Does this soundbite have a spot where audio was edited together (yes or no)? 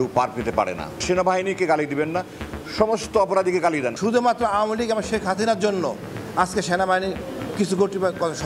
yes